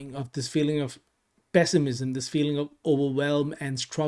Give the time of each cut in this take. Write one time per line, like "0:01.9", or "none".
none